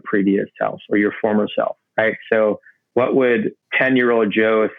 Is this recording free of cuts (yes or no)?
no